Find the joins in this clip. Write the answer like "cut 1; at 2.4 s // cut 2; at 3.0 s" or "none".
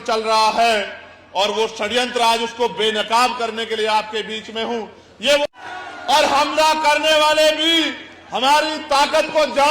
cut 1; at 5.4 s